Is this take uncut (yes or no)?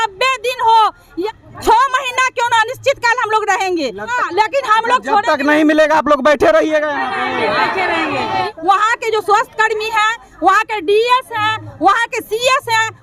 no